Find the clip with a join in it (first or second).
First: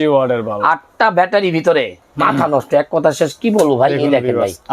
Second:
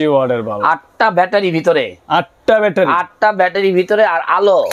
first